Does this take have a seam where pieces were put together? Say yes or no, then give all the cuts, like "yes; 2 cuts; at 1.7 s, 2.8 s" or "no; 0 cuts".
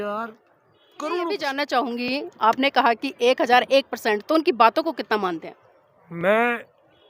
yes; 1 cut; at 1.4 s